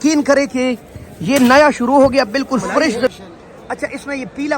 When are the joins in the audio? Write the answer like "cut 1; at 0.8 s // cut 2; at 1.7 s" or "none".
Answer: cut 1; at 3.1 s